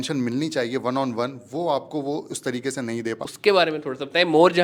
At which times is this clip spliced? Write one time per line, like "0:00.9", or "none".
0:03.3